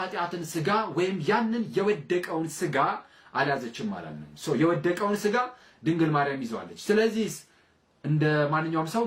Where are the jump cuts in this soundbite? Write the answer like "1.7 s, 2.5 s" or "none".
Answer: none